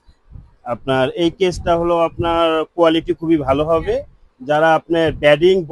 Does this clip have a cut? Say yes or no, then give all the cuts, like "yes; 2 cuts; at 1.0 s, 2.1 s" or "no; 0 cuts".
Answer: no; 0 cuts